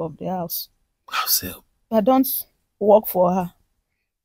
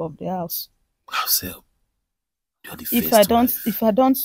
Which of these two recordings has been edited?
first; 1 cut; at 1.9 s

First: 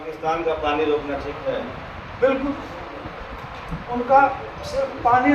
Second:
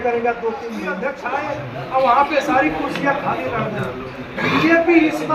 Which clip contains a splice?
second; 1 cut; at 1.0 s

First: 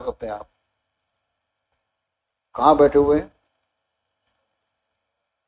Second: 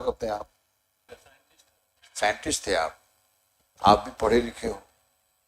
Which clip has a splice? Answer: second; 1 cut; at 1.1 s

